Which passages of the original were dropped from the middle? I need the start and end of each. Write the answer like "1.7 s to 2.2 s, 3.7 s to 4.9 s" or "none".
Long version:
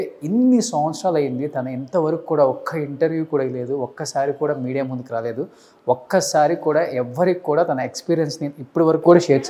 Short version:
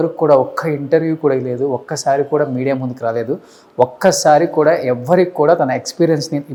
none